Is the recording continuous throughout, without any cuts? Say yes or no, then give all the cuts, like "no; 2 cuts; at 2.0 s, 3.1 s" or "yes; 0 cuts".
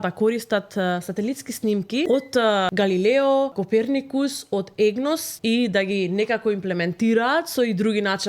no; 3 cuts; at 2.4 s, 3.6 s, 5.3 s